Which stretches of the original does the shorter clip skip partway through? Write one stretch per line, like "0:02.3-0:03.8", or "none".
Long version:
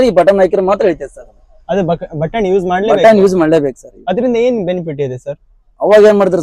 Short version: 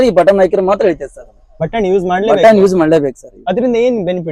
0:01.5-0:02.1